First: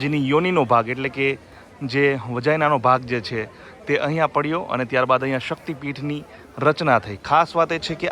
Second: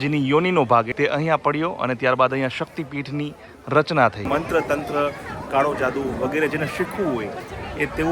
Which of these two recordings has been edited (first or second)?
second